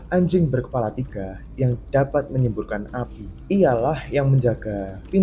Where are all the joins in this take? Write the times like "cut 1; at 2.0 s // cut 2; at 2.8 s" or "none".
none